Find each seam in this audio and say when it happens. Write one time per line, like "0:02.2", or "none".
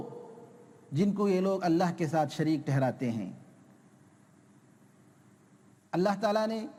none

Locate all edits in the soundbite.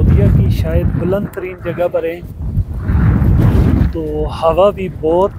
none

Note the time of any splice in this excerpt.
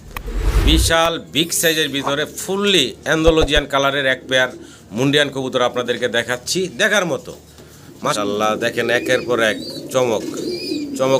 0:08.1

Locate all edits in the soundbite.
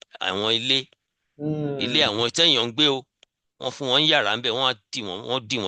none

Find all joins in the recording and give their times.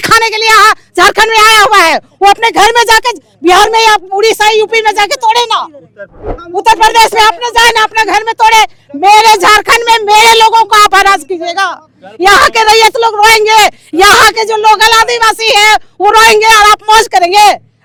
none

